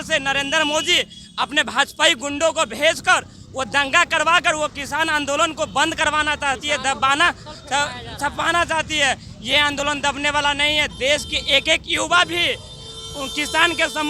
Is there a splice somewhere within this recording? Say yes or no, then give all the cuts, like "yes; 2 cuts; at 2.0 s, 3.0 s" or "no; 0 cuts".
no; 0 cuts